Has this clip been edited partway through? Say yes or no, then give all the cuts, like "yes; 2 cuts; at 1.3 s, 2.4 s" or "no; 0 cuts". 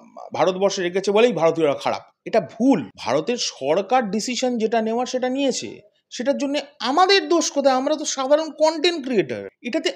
no; 0 cuts